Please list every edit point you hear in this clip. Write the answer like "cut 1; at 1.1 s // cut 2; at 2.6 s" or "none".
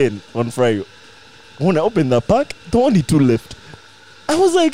none